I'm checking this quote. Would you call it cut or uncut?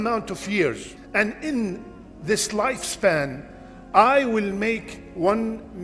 cut